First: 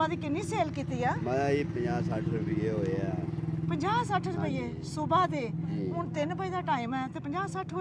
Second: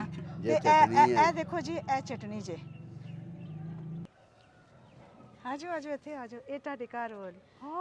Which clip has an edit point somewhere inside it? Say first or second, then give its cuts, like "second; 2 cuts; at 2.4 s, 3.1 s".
second; 1 cut; at 4.1 s